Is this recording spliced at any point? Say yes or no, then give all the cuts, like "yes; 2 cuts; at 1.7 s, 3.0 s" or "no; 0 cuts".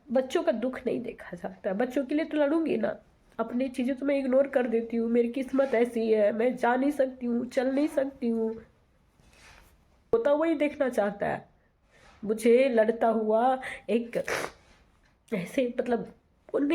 yes; 1 cut; at 10.1 s